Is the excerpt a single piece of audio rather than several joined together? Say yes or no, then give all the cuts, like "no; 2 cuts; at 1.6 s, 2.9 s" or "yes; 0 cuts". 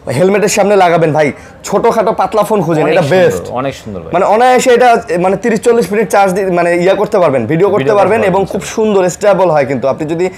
yes; 0 cuts